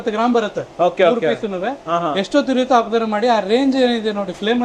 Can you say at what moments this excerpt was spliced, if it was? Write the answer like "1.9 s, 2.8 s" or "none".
none